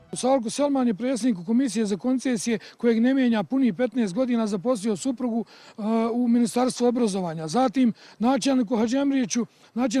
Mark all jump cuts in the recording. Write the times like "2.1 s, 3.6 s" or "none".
1.2 s